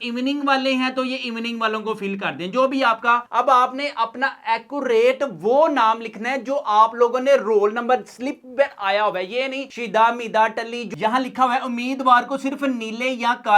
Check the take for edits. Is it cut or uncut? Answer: cut